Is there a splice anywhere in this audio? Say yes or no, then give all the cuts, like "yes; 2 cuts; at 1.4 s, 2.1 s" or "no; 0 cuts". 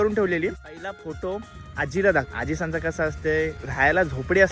yes; 3 cuts; at 1.0 s, 2.3 s, 3.6 s